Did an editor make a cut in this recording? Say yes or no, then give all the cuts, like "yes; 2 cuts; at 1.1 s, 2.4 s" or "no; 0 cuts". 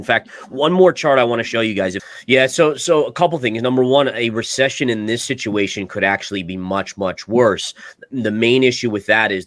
yes; 1 cut; at 2.1 s